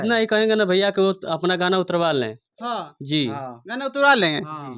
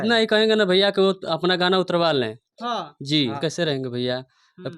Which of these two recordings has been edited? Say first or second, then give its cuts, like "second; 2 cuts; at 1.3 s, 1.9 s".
second; 1 cut; at 3.4 s